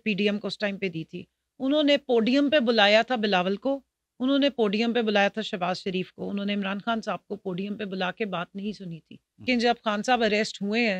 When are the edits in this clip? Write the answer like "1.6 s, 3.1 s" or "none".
9.4 s